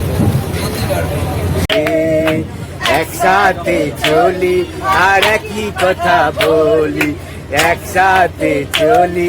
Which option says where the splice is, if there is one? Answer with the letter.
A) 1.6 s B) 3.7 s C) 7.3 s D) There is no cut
A